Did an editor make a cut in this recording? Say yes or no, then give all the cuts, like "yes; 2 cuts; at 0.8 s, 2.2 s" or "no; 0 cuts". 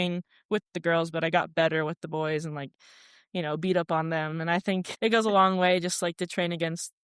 no; 0 cuts